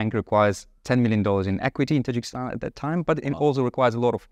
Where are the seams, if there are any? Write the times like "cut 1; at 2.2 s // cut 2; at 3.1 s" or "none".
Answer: none